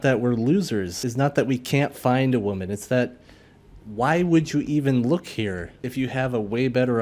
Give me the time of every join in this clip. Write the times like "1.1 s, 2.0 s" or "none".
1.0 s, 5.8 s